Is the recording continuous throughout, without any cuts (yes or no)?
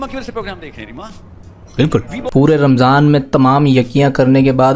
no